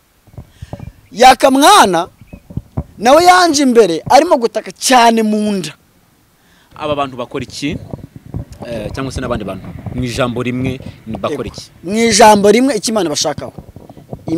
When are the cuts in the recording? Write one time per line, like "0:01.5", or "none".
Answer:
0:06.7